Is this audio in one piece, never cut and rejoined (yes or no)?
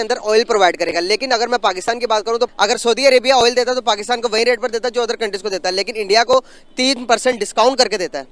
no